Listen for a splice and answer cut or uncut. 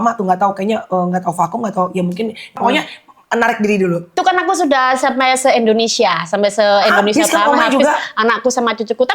cut